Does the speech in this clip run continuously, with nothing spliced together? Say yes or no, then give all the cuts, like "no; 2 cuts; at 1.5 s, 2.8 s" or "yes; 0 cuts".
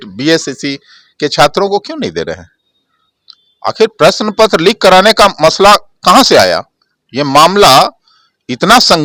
yes; 0 cuts